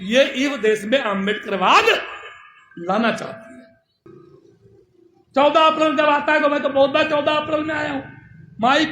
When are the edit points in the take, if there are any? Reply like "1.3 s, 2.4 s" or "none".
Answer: 4.0 s